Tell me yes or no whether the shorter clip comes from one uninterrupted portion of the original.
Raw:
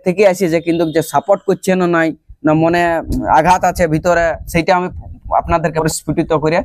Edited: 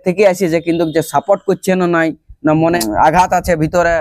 no